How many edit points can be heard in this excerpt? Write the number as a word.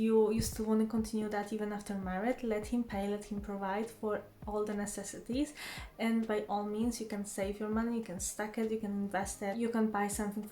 one